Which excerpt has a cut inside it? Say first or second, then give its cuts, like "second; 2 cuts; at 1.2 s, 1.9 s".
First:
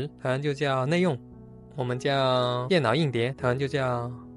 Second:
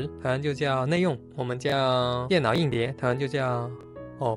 second; 1 cut; at 1.3 s